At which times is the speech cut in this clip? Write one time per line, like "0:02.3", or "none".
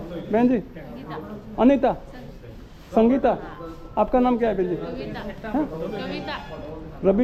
none